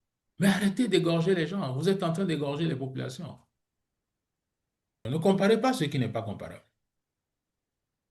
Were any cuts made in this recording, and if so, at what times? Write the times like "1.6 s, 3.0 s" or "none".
5.0 s

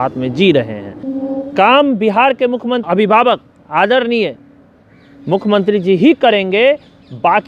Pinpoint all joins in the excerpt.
1.1 s, 2.8 s

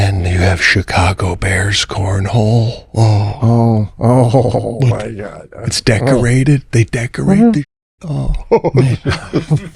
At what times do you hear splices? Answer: none

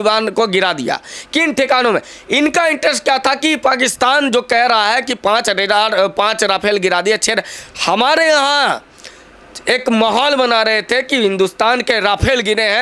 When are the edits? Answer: none

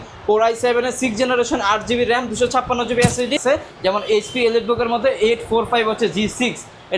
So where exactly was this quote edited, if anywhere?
3.4 s

